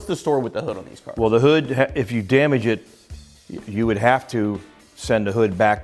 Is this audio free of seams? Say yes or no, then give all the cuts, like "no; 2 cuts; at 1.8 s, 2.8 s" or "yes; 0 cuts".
yes; 0 cuts